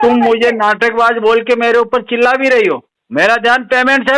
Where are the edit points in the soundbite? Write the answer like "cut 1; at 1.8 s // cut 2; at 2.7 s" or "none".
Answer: cut 1; at 2.9 s